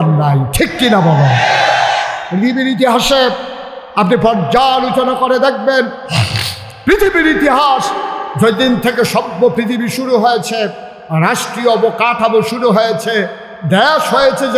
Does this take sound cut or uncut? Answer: uncut